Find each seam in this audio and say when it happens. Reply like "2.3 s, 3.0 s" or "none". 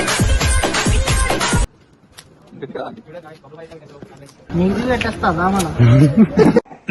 1.7 s